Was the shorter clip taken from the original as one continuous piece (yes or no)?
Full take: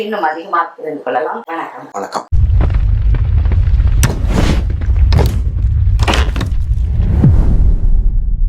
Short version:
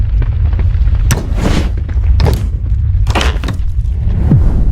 yes